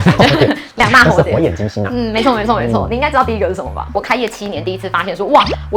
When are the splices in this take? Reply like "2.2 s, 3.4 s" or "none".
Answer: 3.9 s